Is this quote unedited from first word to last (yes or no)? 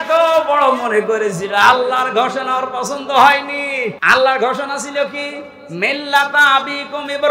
no